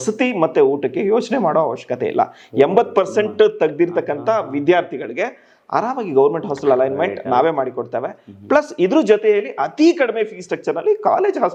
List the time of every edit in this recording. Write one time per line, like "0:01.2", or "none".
none